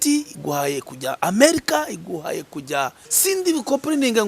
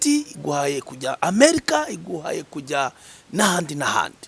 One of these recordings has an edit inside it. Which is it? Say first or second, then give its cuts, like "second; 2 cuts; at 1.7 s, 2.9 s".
first; 1 cut; at 3.1 s